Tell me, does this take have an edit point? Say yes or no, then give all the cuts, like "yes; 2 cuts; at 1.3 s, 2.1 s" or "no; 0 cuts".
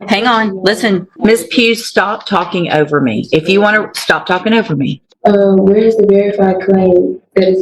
yes; 2 cuts; at 1.1 s, 5.0 s